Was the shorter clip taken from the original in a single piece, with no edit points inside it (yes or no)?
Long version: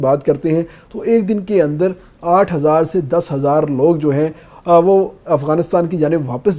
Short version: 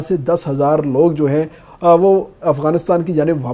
yes